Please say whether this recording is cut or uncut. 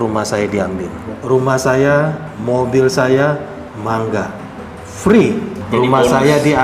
cut